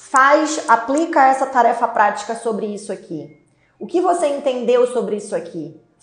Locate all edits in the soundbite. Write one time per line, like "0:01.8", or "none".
none